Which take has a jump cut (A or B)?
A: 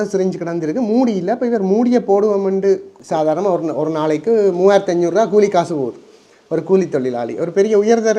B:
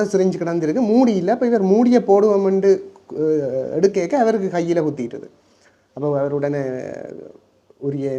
A